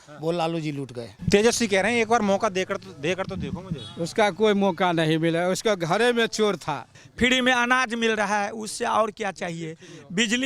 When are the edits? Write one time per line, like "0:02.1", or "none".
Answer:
0:01.1
0:07.0